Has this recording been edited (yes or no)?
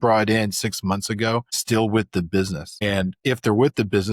yes